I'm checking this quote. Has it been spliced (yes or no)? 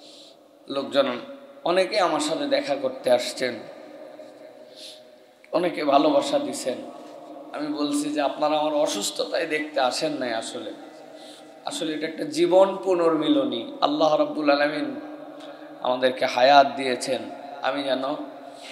no